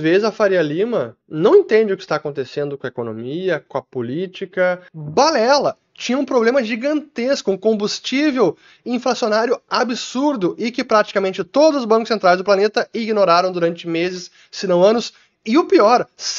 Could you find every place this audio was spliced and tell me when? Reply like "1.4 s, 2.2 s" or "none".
4.9 s